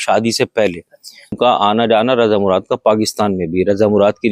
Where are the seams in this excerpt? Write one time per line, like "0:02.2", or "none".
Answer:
0:01.4